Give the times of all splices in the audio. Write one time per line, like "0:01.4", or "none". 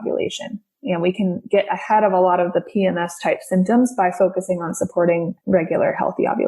0:05.4

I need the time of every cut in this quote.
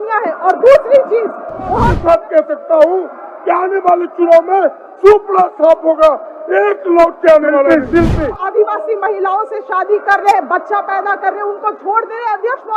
0:01.9
0:08.1

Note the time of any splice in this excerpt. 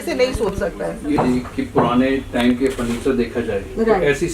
0:01.2

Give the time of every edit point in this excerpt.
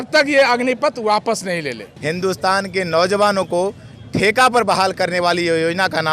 0:01.8

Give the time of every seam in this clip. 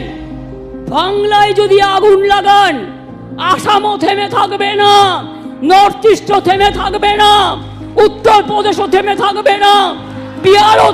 none

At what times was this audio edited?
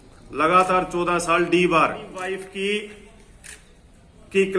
0:02.2

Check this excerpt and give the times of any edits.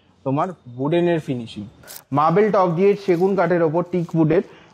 0:01.9

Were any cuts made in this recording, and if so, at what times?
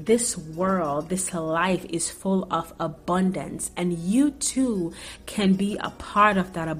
none

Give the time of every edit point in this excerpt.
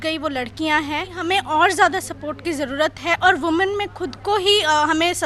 0:01.2

